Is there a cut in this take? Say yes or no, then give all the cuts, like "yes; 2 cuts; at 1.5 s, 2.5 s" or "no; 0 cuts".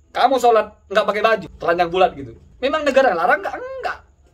yes; 2 cuts; at 1.5 s, 2.7 s